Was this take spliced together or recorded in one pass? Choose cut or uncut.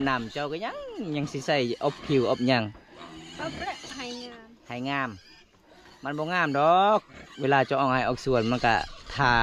uncut